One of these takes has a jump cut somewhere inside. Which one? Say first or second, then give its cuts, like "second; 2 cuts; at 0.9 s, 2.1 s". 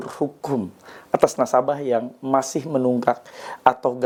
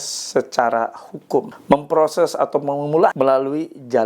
second; 2 cuts; at 1.5 s, 3.1 s